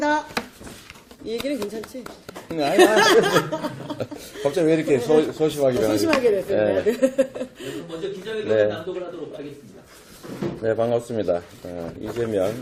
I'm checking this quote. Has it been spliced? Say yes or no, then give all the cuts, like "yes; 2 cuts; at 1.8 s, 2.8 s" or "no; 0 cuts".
no; 0 cuts